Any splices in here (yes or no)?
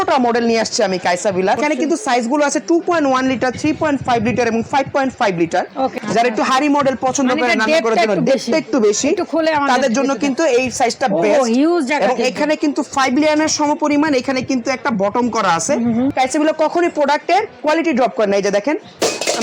yes